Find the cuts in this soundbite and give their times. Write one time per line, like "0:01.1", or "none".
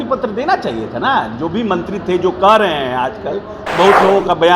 0:03.6